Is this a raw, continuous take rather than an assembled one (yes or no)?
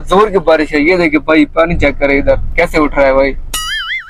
yes